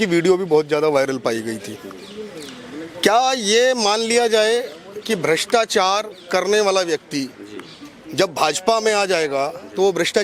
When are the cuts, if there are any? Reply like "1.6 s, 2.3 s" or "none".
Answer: none